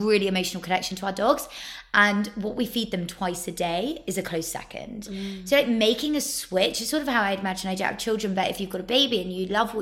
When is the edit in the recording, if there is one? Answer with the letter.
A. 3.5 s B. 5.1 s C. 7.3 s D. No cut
D